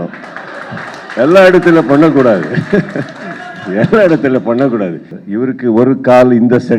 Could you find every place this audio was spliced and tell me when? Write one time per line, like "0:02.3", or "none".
0:05.1